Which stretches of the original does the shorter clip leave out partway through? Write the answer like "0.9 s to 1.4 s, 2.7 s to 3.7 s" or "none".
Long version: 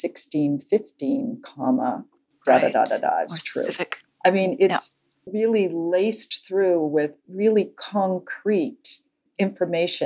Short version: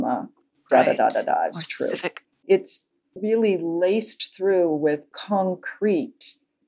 4.2 s to 4.5 s, 7.2 s to 7.8 s